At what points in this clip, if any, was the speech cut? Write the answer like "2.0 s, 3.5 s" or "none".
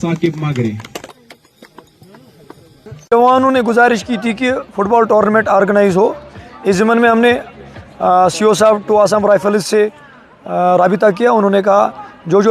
2.9 s